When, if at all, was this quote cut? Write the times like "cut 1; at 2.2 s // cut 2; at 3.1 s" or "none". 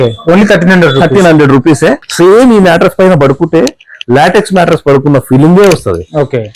cut 1; at 2.0 s